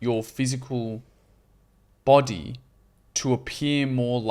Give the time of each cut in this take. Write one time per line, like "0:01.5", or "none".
none